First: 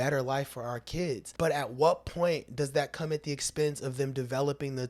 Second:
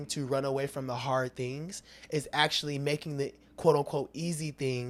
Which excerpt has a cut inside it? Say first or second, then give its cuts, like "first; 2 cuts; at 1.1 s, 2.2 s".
first; 1 cut; at 1.3 s